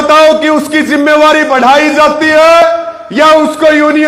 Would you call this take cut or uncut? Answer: uncut